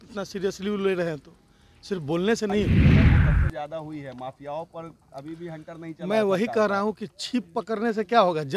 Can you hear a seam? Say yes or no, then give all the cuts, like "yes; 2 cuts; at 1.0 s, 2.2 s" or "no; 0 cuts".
yes; 1 cut; at 2.7 s